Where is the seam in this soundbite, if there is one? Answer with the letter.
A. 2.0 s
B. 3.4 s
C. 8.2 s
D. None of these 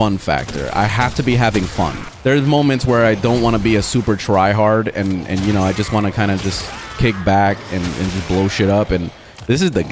A